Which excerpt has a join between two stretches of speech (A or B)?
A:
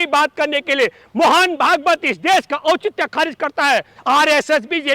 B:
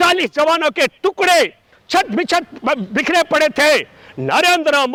A